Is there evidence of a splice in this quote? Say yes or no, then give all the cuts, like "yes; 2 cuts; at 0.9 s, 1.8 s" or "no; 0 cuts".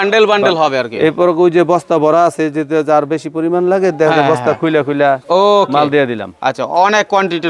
no; 0 cuts